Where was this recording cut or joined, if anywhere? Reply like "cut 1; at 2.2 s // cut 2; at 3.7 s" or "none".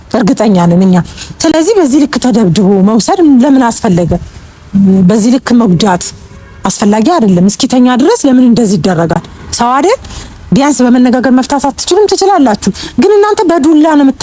none